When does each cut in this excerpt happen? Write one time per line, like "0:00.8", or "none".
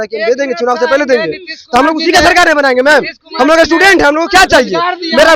none

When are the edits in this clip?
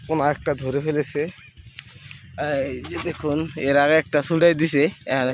none

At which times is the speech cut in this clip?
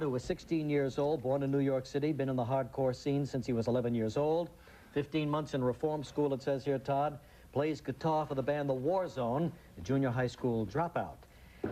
0:05.5

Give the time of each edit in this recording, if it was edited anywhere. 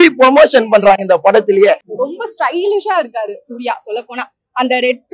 0:01.9

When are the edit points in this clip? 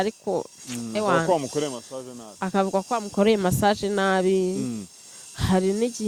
none

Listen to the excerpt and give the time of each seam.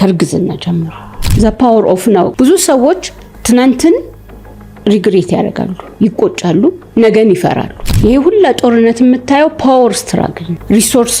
0:01.2
0:07.7

